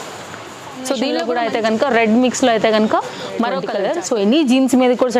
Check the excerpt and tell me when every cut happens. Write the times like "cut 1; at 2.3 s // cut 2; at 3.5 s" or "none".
cut 1; at 1.2 s // cut 2; at 3.7 s

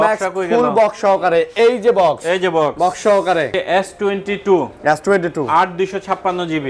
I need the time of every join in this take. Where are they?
cut 1; at 3.6 s

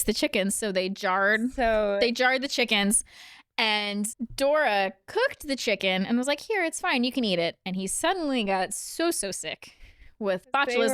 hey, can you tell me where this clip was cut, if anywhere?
cut 1; at 4.2 s

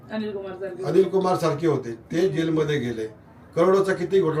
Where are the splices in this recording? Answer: none

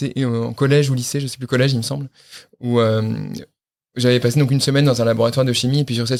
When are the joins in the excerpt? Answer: none

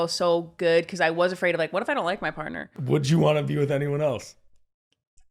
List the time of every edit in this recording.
cut 1; at 2.7 s

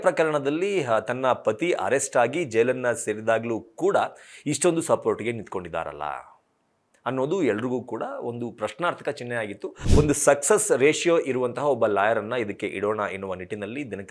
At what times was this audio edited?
cut 1; at 9.8 s

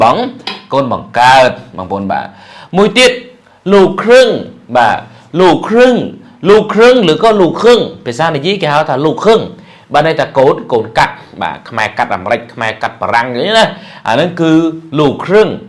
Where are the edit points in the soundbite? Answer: none

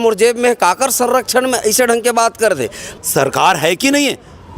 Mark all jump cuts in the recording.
cut 1; at 2.8 s

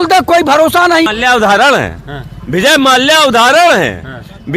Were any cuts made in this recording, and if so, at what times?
cut 1; at 1.1 s

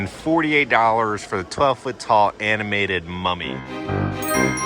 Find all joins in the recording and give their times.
none

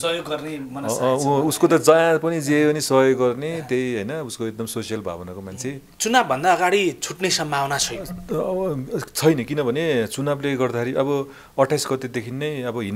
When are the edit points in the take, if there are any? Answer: cut 1; at 5.9 s

